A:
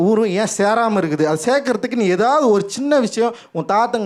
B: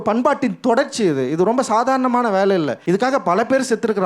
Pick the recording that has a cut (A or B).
B